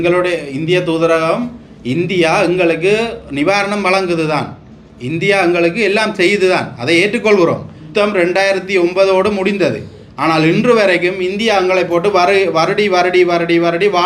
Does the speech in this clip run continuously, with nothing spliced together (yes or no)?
no